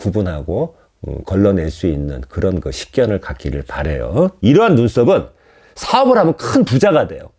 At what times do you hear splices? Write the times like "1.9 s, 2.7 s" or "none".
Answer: 4.4 s